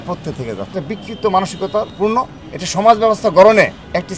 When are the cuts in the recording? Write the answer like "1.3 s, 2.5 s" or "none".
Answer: 0.7 s, 1.9 s